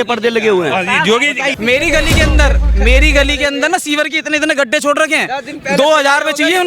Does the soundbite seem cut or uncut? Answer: cut